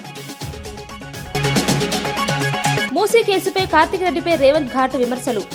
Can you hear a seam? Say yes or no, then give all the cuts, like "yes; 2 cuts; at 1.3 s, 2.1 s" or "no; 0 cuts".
no; 0 cuts